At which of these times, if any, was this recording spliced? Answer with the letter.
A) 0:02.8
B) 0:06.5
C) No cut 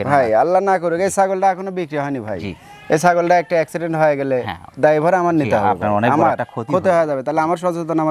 C